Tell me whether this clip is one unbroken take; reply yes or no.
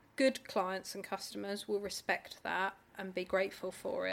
yes